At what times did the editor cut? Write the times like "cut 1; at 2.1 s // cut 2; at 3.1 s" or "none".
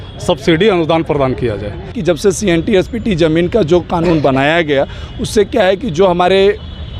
cut 1; at 2.0 s